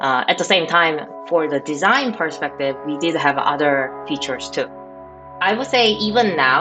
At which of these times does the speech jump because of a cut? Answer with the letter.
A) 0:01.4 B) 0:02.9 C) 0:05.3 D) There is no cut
C